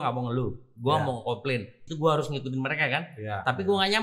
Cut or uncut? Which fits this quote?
cut